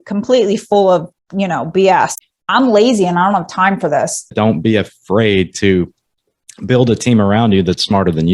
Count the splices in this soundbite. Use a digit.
2